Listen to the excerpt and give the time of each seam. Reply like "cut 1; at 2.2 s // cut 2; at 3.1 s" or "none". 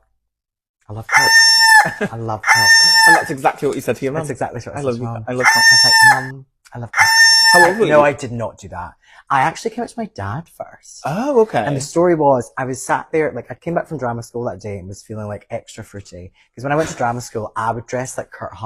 none